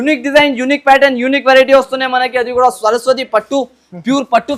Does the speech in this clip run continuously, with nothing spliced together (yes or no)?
yes